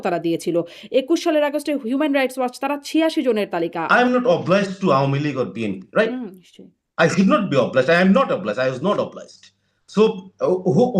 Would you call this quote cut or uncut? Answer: cut